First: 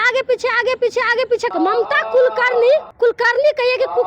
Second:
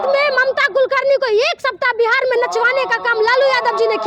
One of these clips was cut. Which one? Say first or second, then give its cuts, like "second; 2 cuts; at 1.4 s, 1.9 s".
first; 2 cuts; at 1.5 s, 2.9 s